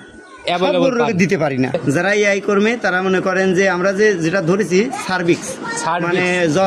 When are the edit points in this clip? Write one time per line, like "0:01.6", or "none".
0:01.8